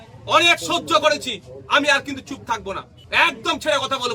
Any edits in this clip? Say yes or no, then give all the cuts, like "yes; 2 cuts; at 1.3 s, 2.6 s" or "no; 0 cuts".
yes; 1 cut; at 2.9 s